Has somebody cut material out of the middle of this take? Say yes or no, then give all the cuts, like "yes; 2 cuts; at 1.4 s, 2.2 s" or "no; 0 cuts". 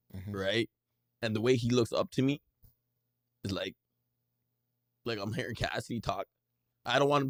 no; 0 cuts